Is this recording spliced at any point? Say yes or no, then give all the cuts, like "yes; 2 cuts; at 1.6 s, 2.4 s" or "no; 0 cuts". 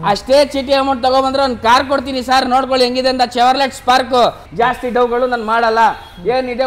yes; 1 cut; at 4.4 s